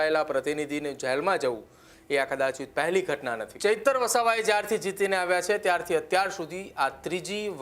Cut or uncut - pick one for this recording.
cut